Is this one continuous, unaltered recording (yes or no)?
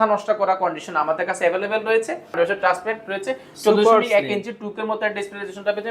no